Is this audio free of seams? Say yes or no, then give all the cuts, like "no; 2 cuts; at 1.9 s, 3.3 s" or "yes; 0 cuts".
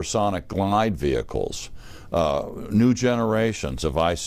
yes; 0 cuts